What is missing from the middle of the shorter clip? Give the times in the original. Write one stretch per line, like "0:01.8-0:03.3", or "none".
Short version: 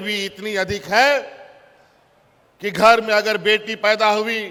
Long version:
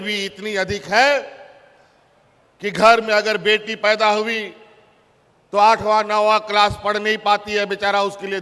none